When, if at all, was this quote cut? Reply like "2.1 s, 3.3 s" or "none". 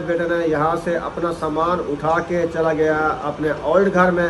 none